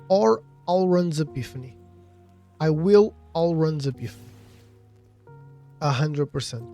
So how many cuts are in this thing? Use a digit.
2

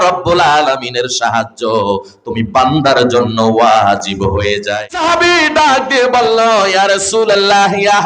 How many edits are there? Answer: 1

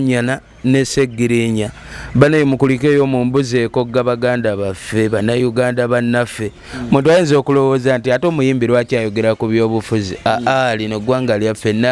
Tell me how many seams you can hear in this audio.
0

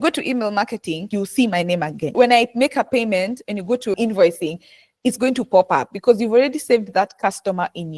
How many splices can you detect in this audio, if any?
0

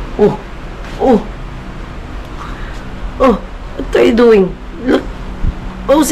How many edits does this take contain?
0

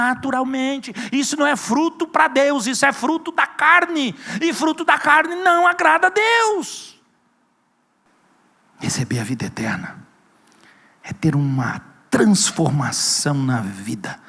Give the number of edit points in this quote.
1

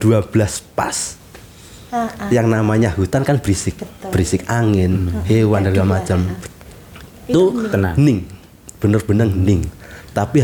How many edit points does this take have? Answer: 0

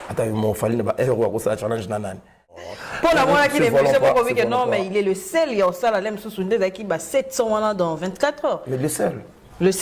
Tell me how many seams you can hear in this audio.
1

